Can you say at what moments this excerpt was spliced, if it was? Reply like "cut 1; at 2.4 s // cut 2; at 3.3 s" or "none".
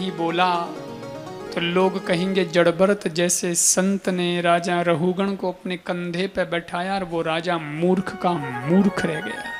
none